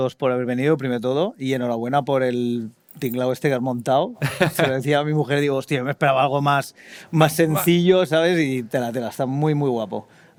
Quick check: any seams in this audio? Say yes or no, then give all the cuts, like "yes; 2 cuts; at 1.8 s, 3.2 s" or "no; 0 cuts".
no; 0 cuts